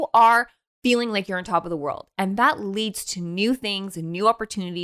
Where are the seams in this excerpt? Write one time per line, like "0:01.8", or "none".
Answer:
none

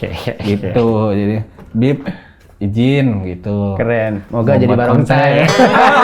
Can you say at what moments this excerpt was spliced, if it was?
none

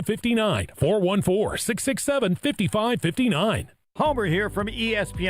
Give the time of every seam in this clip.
0:03.8

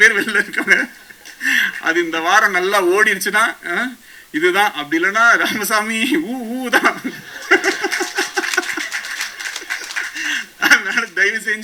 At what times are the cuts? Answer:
none

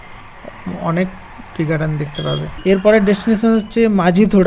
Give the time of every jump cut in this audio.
0:02.5

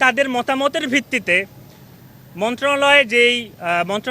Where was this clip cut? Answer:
none

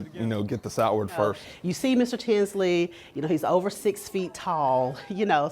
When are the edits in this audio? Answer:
0:01.5

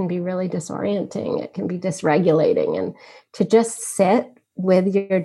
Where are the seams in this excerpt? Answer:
none

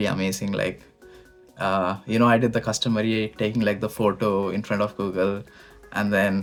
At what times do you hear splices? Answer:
none

